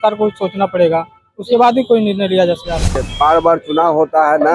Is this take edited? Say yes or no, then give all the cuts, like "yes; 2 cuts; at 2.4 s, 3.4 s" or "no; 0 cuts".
yes; 1 cut; at 3.1 s